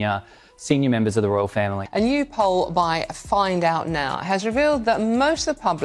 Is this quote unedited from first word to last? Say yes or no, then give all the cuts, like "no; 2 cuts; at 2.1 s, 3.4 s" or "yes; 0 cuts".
no; 1 cut; at 1.8 s